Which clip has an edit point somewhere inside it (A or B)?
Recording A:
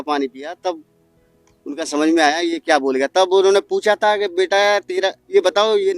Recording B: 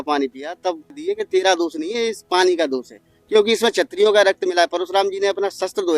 B